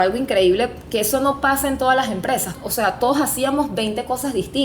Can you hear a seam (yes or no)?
yes